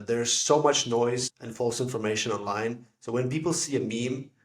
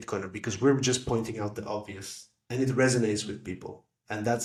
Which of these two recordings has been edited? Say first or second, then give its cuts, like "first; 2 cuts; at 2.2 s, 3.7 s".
first; 1 cut; at 1.4 s